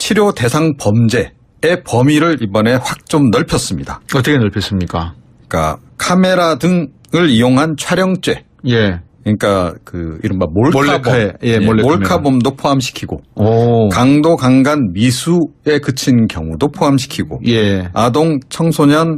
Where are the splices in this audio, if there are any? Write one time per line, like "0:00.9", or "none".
0:03.3